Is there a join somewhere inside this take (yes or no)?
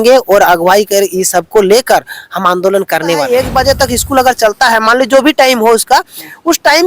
yes